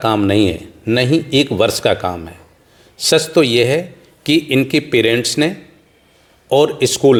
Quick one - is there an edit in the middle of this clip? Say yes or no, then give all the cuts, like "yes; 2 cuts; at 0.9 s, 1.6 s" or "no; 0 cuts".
no; 0 cuts